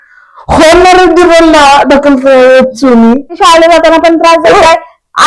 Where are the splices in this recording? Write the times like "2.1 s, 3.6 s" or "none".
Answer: 3.4 s